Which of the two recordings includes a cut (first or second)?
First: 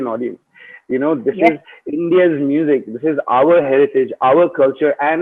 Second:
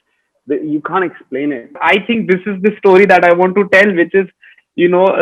second